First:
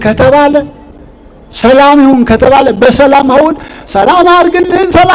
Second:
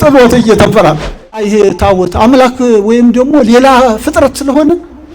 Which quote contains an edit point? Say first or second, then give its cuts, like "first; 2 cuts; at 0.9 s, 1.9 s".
second; 1 cut; at 1.4 s